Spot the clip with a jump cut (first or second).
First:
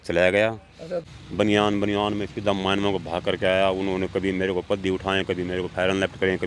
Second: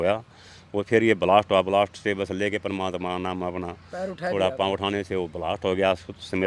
first